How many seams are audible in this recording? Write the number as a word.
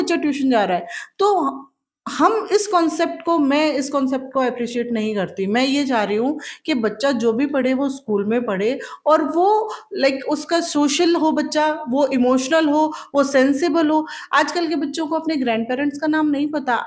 zero